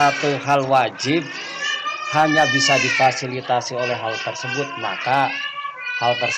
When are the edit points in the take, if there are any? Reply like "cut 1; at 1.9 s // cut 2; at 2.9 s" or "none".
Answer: none